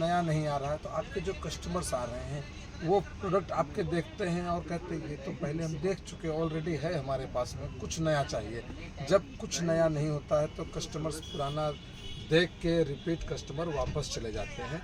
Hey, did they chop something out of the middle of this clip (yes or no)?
no